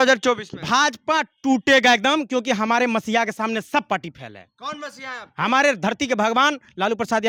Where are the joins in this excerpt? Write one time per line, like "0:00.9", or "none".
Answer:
none